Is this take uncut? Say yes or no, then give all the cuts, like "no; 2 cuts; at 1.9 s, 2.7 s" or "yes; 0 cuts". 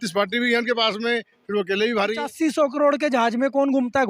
no; 1 cut; at 2.3 s